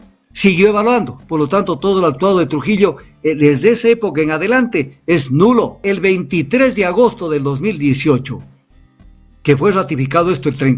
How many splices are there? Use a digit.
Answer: 1